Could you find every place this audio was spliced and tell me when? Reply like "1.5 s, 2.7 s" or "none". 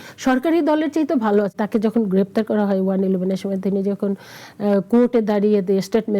1.5 s